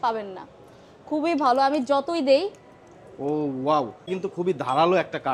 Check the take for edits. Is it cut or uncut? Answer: uncut